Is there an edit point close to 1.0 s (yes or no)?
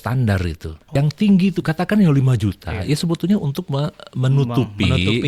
yes